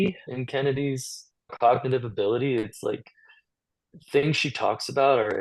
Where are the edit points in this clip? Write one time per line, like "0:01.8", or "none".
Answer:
none